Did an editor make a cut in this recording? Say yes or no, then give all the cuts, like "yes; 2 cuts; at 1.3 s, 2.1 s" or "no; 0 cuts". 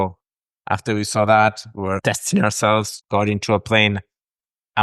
yes; 2 cuts; at 2.0 s, 3.0 s